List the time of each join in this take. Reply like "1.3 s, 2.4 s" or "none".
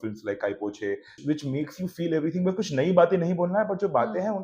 1.2 s